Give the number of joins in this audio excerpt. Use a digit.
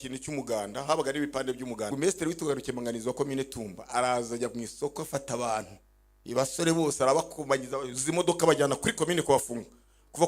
1